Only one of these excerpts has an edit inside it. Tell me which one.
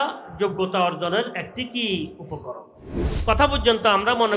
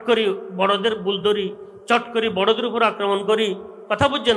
first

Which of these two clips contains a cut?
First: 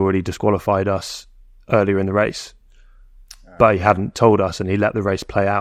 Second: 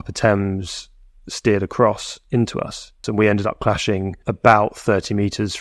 second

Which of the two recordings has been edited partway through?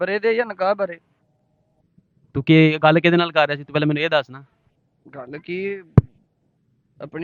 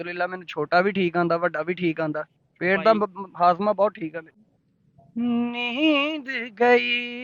second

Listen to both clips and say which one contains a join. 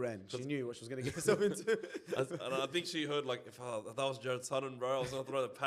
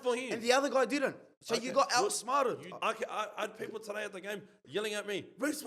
second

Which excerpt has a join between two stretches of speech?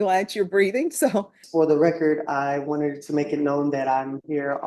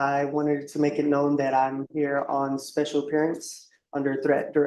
first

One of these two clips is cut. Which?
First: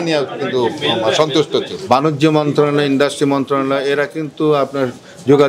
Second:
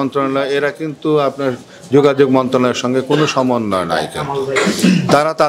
first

